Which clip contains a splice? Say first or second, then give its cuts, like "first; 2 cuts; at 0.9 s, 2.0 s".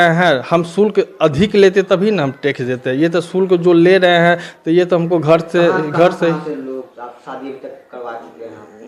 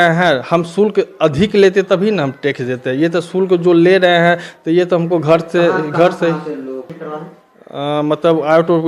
second; 1 cut; at 7.0 s